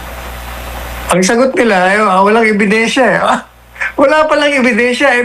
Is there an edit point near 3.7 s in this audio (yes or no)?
no